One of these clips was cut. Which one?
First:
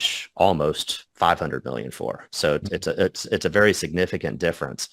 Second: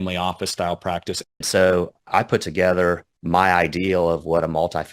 second; 3 cuts; at 1.4 s, 2.1 s, 3.1 s

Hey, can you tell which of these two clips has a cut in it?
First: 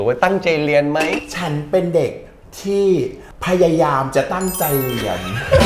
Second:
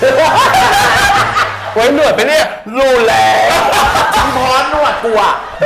first; 1 cut; at 1.1 s

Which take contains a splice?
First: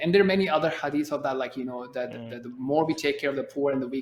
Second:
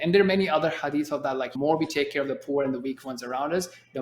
second; 1 cut; at 1.5 s

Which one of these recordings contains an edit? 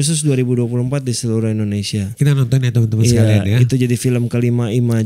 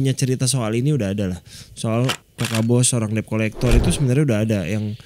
second; 1 cut; at 2.3 s

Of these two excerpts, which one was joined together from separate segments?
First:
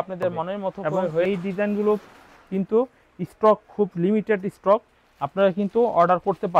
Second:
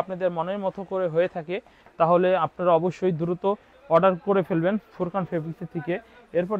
first; 1 cut; at 1.2 s

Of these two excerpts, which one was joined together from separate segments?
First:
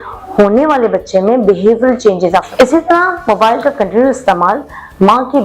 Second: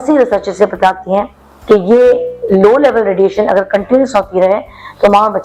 first; 1 cut; at 2.5 s

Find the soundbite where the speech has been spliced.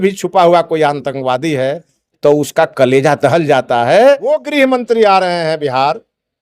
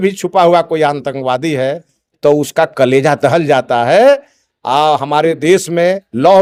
first; 1 cut; at 4.4 s

